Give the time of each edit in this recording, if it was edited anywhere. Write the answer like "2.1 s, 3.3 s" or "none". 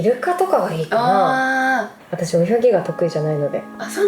2.0 s